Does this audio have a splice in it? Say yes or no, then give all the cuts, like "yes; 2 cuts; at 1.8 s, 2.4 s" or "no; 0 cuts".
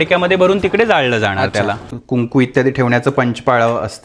yes; 1 cut; at 1.8 s